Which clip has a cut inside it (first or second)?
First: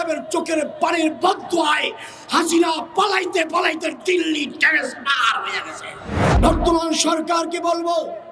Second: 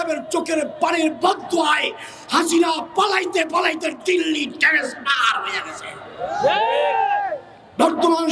first